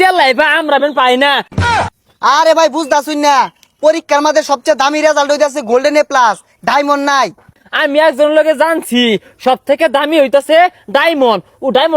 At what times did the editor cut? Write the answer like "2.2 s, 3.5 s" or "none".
1.6 s, 7.6 s